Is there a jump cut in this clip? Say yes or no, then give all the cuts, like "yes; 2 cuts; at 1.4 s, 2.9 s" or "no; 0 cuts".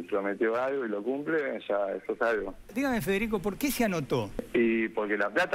yes; 2 cuts; at 2.7 s, 4.4 s